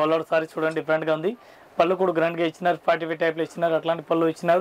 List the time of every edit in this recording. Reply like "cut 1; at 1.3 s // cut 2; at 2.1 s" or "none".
none